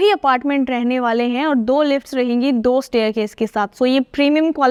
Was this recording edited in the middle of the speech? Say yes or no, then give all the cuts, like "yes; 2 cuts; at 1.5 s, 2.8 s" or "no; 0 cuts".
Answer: no; 0 cuts